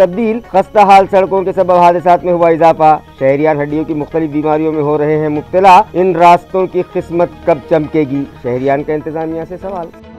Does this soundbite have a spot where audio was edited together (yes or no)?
no